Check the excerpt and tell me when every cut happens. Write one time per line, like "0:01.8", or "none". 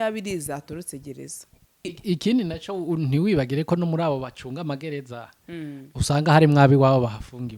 0:01.9